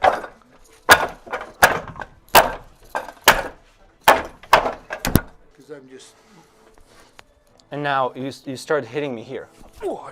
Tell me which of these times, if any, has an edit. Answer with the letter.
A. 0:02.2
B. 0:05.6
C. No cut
B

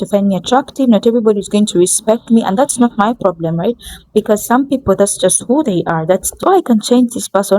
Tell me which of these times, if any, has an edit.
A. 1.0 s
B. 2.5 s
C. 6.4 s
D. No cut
C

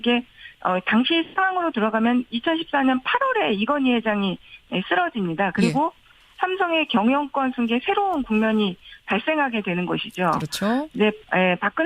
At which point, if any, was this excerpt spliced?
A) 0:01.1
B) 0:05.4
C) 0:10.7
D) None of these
A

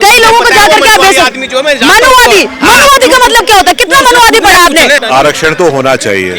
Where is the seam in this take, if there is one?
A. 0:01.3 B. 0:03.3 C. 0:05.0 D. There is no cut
C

